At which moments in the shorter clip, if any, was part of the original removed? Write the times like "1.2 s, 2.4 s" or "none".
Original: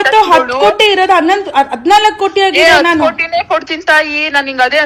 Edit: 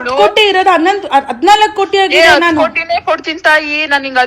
none